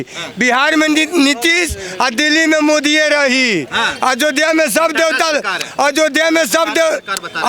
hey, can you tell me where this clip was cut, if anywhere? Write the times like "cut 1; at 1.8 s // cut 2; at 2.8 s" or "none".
none